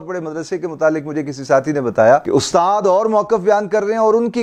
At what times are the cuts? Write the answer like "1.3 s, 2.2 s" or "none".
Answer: none